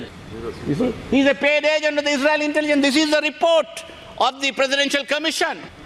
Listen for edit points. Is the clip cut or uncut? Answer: uncut